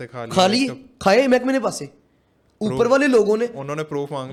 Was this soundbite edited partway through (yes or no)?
no